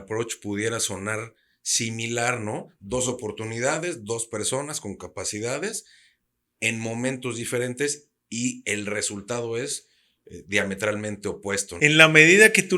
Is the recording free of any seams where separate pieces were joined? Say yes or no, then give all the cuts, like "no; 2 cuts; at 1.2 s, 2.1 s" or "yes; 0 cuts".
no; 1 cut; at 11.7 s